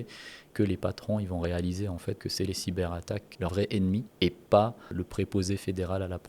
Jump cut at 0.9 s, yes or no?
no